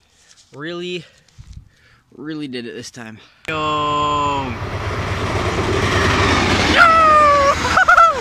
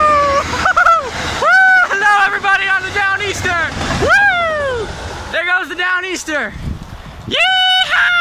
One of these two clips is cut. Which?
first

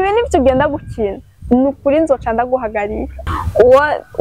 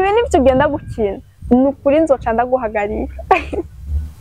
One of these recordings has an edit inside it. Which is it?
first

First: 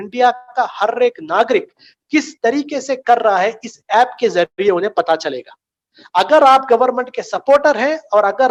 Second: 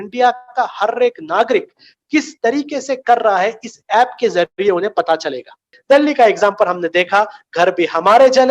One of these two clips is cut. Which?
second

